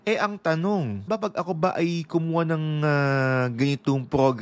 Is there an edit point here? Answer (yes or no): yes